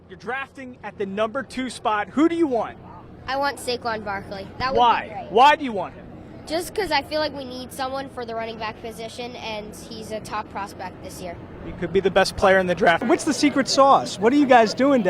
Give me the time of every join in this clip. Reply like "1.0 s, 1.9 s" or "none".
13.0 s